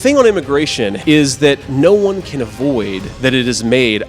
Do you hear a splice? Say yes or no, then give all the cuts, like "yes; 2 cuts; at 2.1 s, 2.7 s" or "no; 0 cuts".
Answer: yes; 2 cuts; at 1.0 s, 1.7 s